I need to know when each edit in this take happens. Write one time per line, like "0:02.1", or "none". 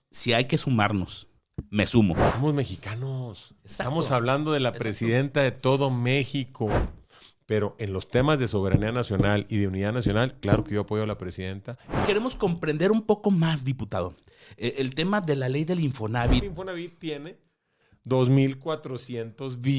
0:02.3
0:06.8
0:12.0
0:16.4

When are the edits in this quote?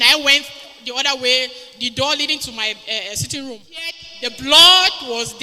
0:04.1

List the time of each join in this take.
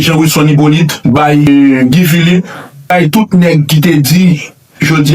0:01.5
0:02.9

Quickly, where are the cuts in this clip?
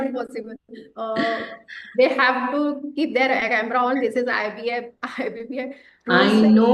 none

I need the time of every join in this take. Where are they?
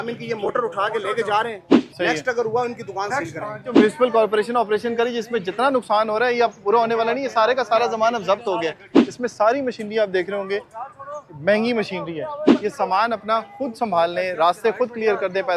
0:01.7
0:03.8
0:09.0
0:12.4

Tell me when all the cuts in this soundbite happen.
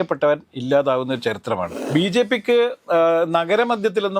0:01.7

